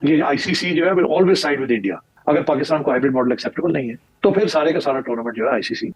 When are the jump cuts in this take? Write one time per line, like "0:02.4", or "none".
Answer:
0:02.1